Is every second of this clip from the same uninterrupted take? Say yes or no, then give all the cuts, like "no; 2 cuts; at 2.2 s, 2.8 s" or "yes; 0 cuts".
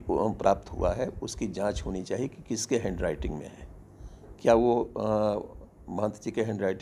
yes; 0 cuts